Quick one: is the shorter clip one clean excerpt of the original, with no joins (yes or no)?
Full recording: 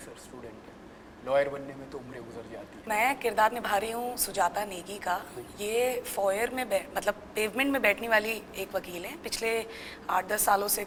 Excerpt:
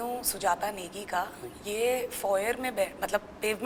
yes